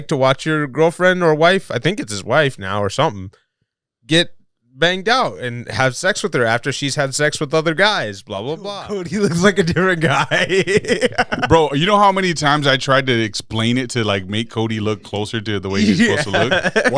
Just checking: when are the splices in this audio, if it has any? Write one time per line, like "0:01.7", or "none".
0:08.7